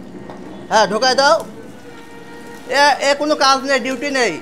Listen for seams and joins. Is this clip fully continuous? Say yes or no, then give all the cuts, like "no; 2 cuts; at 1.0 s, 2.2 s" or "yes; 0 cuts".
yes; 0 cuts